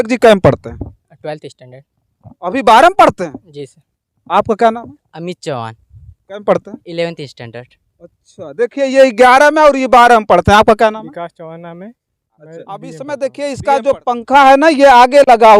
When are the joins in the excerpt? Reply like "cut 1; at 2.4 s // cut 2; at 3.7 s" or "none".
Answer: cut 1; at 12.9 s